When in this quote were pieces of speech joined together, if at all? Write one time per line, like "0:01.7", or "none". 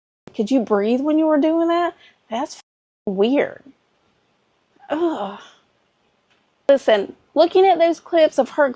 0:06.8

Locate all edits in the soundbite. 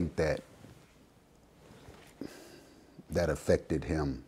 none

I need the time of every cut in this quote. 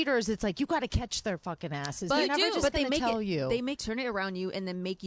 0:03.8

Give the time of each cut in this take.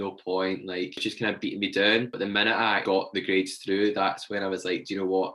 0:01.0
0:02.8

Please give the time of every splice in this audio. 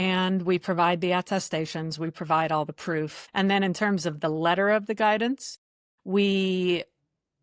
0:03.2

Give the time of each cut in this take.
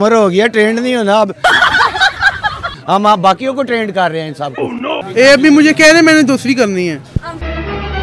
0:02.7
0:05.0

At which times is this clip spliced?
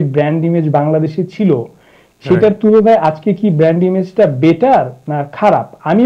none

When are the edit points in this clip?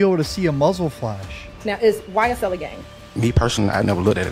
0:01.4

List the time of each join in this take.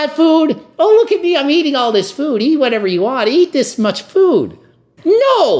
none

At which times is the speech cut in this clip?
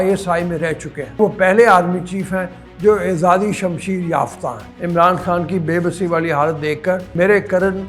0:01.2
0:04.7
0:07.1

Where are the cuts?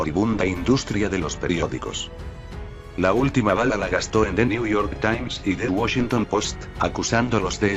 0:01.8

